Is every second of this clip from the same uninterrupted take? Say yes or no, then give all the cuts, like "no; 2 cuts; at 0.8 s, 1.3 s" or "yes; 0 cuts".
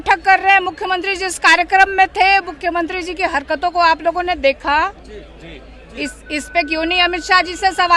yes; 0 cuts